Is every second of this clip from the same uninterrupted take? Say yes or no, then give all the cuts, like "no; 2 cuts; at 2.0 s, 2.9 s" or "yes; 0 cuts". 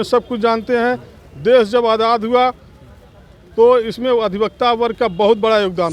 yes; 0 cuts